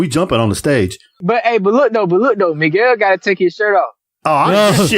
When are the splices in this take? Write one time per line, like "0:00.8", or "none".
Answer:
0:01.2

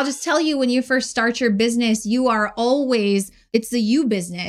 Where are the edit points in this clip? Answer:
0:03.4

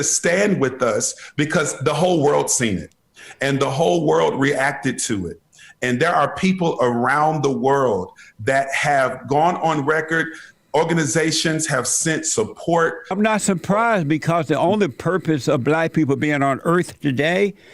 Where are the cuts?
0:13.1

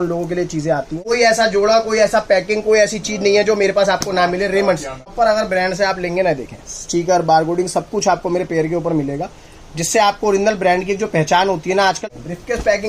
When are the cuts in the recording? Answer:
0:00.9
0:05.1
0:12.1

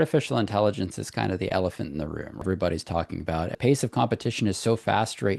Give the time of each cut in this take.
0:02.4
0:03.6

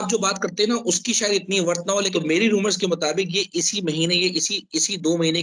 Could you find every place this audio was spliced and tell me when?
0:02.1

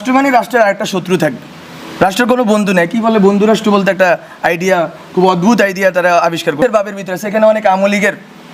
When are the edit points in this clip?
0:06.6

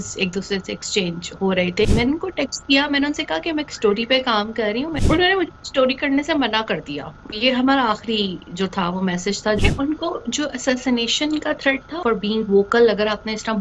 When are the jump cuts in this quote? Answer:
0:01.8
0:04.9
0:09.6
0:11.9

